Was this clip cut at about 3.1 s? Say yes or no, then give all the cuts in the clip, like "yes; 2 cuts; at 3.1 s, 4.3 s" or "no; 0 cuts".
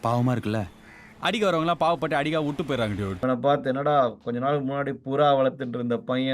yes; 1 cut; at 3.1 s